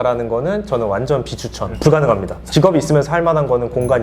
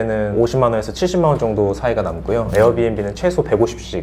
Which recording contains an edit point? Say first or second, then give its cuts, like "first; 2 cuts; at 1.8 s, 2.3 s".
first; 2 cuts; at 1.8 s, 2.4 s